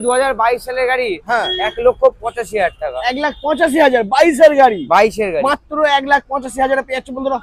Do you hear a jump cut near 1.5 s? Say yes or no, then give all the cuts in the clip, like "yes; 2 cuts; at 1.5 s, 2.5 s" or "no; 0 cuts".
no; 0 cuts